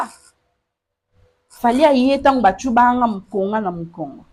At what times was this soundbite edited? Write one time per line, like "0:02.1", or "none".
none